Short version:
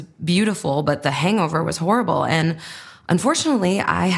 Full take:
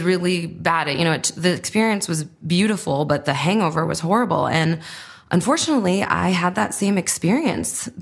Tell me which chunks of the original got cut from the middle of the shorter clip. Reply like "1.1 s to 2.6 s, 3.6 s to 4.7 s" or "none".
none

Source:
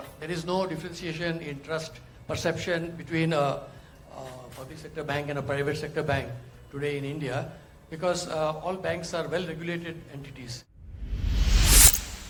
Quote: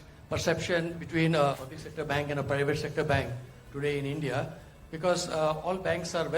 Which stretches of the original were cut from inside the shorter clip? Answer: 3.6 s to 4.6 s

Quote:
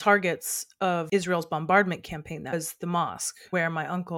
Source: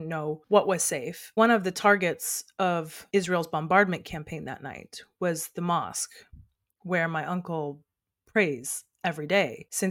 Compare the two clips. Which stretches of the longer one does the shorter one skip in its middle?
2.8 s to 3.1 s, 4.5 s to 5.3 s, 6.1 s to 6.7 s

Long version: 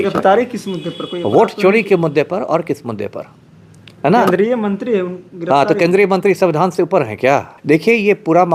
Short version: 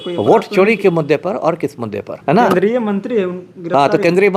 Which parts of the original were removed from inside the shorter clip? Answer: 3.1 s to 3.8 s

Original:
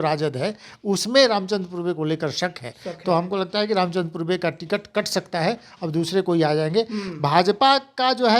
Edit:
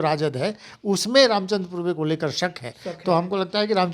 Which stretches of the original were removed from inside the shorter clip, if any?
none

